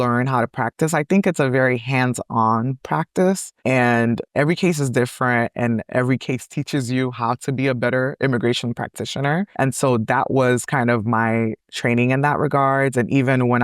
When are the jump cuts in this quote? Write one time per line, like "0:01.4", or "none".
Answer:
0:03.5
0:09.5